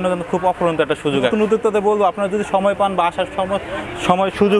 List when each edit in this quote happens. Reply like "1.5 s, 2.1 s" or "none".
1.3 s